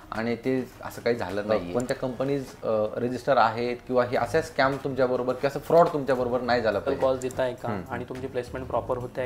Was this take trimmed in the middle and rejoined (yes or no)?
yes